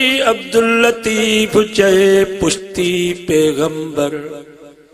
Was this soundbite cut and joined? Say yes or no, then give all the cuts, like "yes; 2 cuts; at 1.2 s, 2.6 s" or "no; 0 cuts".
no; 0 cuts